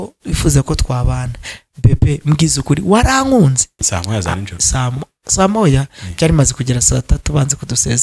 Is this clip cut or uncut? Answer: cut